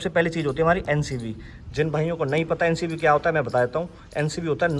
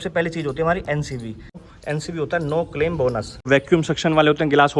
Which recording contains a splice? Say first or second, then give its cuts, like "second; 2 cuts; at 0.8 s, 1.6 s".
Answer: second; 2 cuts; at 1.6 s, 3.5 s